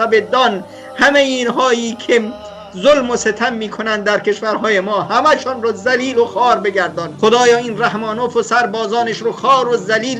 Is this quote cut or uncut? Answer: cut